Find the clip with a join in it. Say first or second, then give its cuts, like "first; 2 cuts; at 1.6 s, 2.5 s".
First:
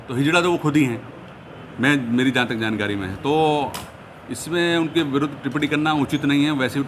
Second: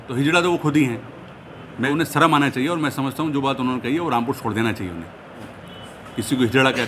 second; 2 cuts; at 1.9 s, 5.6 s